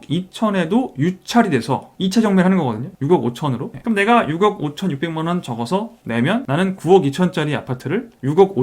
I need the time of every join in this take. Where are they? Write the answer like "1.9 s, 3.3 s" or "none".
3.7 s